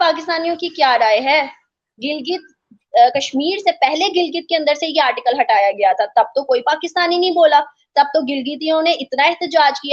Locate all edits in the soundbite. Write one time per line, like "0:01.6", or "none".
none